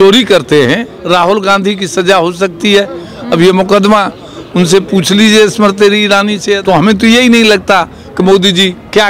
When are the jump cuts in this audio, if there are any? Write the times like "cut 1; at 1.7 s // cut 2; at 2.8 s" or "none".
cut 1; at 0.9 s // cut 2; at 6.6 s